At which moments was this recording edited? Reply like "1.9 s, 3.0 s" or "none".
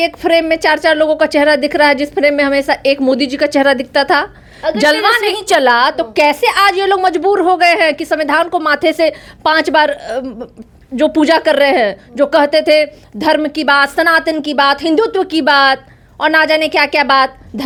none